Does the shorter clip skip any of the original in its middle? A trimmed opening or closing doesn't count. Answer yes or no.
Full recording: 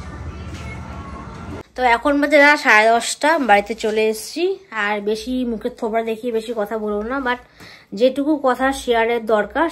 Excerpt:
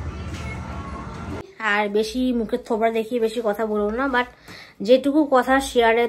yes